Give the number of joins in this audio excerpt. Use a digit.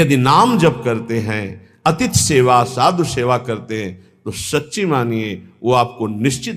0